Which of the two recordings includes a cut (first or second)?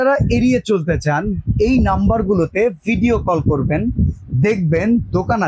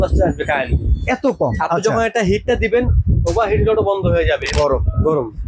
second